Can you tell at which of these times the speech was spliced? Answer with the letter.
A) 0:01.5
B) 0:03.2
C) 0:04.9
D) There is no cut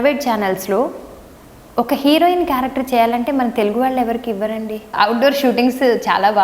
C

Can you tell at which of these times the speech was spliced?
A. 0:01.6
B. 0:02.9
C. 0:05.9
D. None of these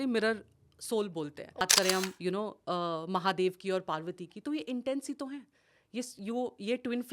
A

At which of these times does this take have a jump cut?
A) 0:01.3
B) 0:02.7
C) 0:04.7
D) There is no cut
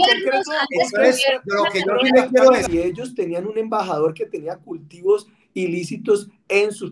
B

